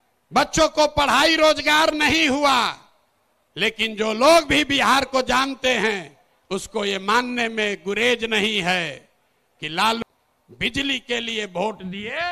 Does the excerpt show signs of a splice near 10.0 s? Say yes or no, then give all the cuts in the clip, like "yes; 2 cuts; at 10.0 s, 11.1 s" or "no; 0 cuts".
yes; 1 cut; at 10.0 s